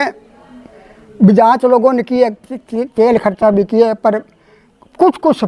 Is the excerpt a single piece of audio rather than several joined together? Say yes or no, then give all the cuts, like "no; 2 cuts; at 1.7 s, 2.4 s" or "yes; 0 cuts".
yes; 0 cuts